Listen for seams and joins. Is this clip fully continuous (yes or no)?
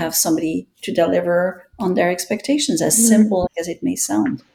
no